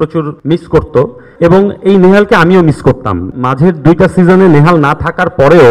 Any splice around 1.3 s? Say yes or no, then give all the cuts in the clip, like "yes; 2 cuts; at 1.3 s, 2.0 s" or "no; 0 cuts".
yes; 2 cuts; at 1.3 s, 3.3 s